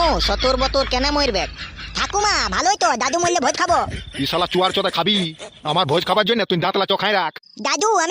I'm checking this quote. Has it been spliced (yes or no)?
no